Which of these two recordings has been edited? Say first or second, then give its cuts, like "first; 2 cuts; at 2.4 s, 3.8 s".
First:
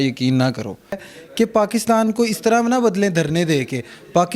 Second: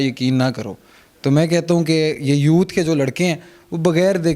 first; 1 cut; at 1.1 s